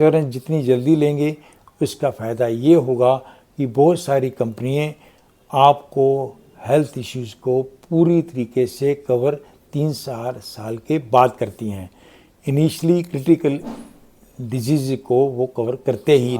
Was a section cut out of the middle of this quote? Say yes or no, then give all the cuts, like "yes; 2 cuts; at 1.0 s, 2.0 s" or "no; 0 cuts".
no; 0 cuts